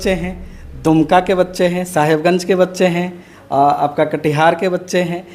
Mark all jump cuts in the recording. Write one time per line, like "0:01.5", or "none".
none